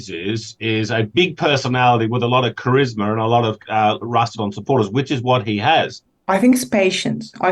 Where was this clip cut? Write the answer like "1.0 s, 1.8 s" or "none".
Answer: 6.0 s